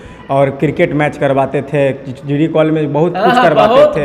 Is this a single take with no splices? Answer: yes; 0 cuts

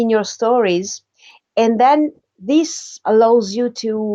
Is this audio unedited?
no; 1 cut; at 3.0 s

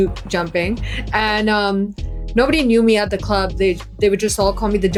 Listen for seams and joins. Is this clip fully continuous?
yes; 0 cuts

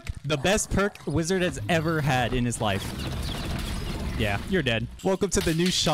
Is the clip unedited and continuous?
no; 2 cuts; at 2.9 s, 4.9 s

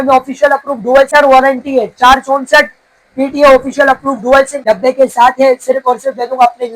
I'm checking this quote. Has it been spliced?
yes; 2 cuts; at 1.1 s, 4.6 s

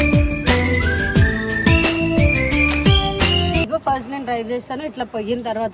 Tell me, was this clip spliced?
yes; 1 cut; at 3.7 s

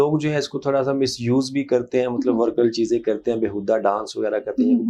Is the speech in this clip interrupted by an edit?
no; 0 cuts

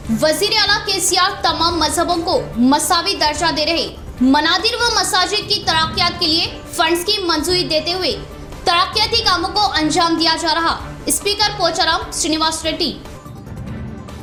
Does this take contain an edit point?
no; 0 cuts

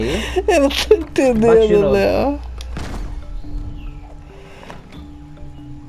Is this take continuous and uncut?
yes; 0 cuts

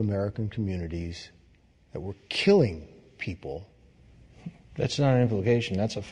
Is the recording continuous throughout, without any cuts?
yes; 0 cuts

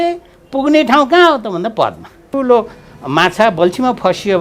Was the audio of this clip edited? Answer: yes; 1 cut; at 2.3 s

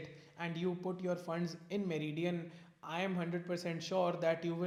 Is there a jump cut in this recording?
no; 0 cuts

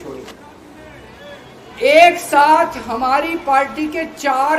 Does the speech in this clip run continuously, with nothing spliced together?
yes; 0 cuts

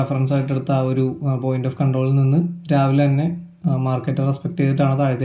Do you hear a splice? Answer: no; 0 cuts

